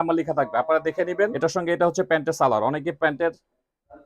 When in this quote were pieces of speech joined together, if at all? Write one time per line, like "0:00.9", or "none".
0:01.4